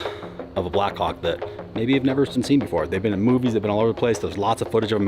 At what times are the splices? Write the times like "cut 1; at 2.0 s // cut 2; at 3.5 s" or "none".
cut 1; at 2.4 s